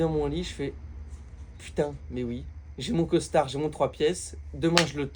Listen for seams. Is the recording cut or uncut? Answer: uncut